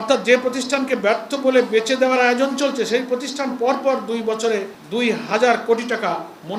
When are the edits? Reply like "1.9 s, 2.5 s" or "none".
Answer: none